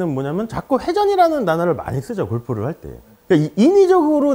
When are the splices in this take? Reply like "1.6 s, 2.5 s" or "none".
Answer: none